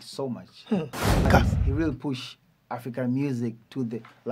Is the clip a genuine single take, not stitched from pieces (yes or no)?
no